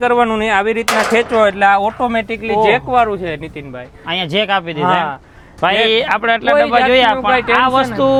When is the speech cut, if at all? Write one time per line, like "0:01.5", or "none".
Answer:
none